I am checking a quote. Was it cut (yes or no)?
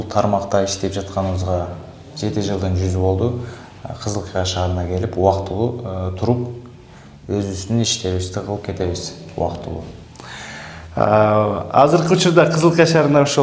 no